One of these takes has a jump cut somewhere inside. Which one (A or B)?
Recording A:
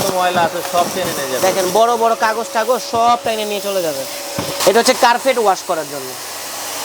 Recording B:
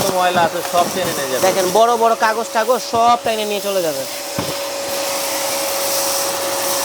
A